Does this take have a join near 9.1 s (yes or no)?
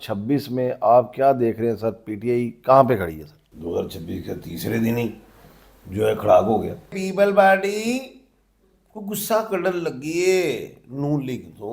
no